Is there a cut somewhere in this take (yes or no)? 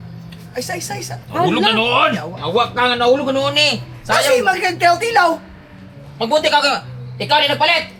no